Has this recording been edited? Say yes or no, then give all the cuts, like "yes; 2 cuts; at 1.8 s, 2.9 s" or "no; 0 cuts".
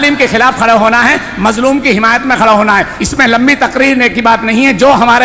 no; 0 cuts